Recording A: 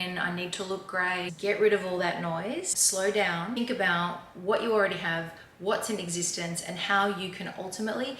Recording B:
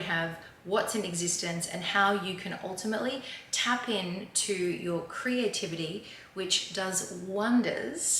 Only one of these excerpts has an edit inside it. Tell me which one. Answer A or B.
A